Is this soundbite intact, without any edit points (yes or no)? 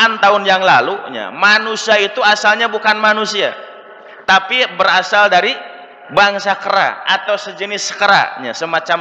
yes